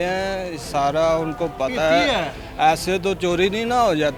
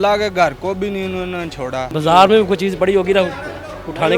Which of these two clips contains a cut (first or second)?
second